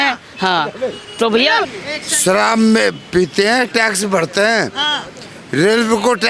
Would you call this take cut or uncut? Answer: cut